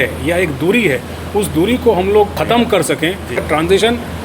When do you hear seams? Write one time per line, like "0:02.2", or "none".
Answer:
0:02.3
0:03.4